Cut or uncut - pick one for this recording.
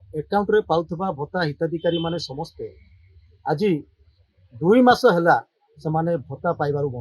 uncut